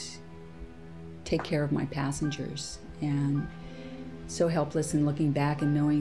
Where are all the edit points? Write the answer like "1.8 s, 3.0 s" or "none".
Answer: none